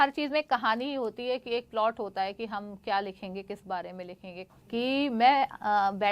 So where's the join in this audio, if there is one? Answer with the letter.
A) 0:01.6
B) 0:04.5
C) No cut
B